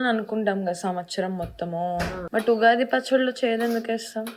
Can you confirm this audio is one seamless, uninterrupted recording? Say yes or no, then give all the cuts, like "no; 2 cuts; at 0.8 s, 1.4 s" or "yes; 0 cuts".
no; 1 cut; at 2.2 s